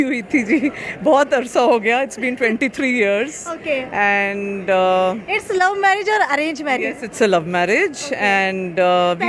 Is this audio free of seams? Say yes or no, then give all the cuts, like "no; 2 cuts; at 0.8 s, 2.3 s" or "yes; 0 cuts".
yes; 0 cuts